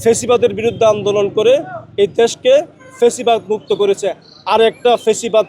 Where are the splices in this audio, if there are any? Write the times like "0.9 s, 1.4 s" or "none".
none